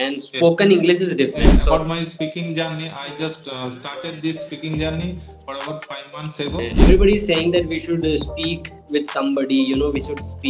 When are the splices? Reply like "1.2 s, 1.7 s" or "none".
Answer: 1.5 s, 6.7 s